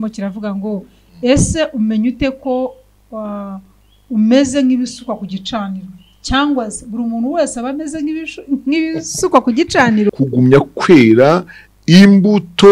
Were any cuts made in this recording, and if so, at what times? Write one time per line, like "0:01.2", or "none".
0:10.1

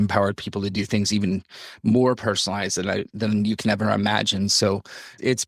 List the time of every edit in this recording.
none

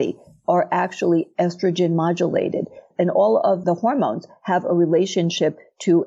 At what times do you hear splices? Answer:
none

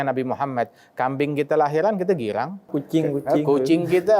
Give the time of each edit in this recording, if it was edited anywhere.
0:02.7

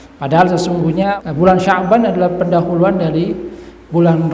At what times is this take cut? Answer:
0:01.2

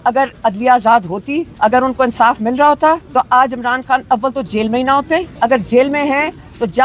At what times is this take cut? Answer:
0:01.5
0:03.1
0:05.3

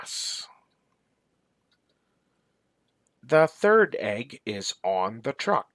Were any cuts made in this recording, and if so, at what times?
0:01.9

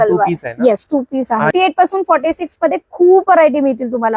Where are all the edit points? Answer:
0:01.5

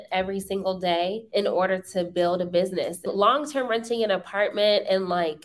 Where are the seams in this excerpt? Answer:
0:01.2
0:03.1

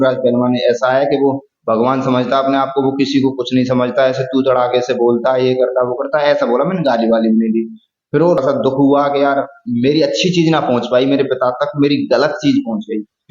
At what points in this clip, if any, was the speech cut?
0:08.4

